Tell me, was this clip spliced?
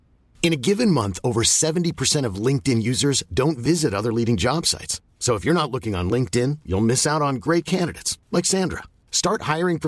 no; 0 cuts

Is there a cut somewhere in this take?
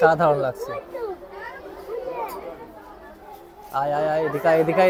no; 0 cuts

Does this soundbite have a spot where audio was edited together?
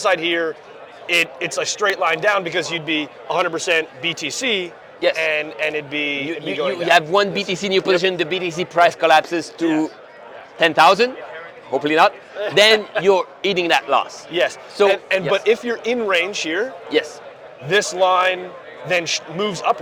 no; 0 cuts

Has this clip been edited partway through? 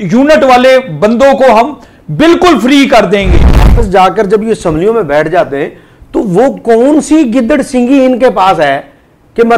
yes; 1 cut; at 3.7 s

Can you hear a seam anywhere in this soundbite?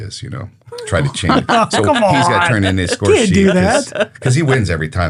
no; 0 cuts

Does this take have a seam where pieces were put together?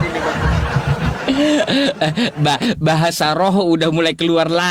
no; 0 cuts

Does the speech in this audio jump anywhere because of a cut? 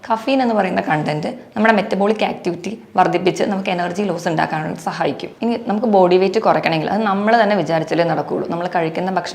yes; 1 cut; at 5.3 s

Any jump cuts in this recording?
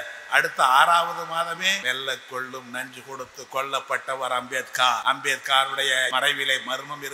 yes; 3 cuts; at 1.8 s, 5.0 s, 6.1 s

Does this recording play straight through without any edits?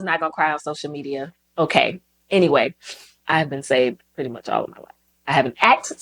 no; 1 cut; at 3.2 s

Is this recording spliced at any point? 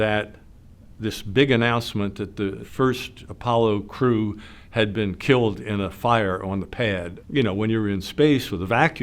yes; 2 cuts; at 2.6 s, 7.2 s

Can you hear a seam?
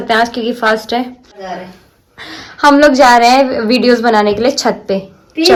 no; 0 cuts

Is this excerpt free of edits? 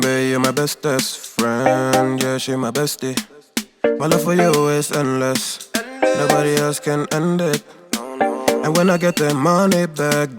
yes; 0 cuts

